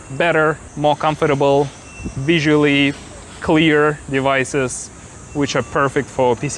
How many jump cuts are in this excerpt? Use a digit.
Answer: 0